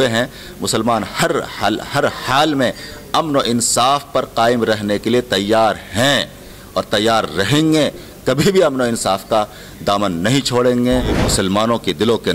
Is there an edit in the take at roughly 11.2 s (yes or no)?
yes